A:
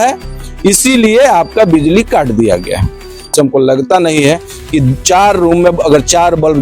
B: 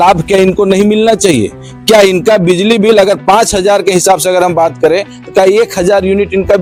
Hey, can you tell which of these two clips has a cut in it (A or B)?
A